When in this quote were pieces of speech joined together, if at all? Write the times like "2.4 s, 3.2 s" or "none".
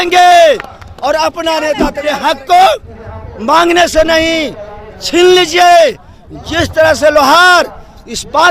2.0 s